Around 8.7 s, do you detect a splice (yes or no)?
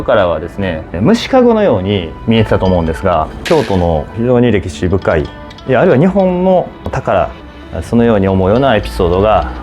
no